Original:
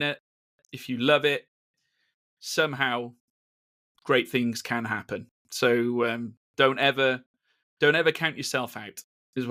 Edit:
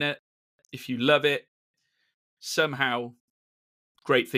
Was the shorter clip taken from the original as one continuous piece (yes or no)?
yes